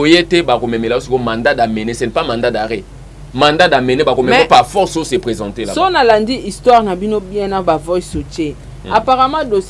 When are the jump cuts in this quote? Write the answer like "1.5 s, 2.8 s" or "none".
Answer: none